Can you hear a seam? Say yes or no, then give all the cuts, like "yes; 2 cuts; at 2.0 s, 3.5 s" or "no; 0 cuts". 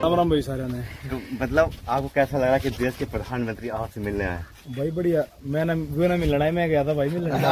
no; 0 cuts